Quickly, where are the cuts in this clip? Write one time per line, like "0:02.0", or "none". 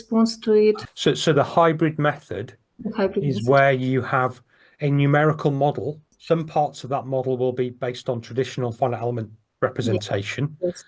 0:00.9
0:06.1